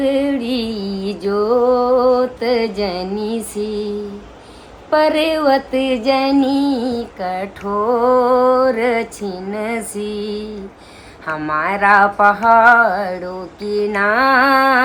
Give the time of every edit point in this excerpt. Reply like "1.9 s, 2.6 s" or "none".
none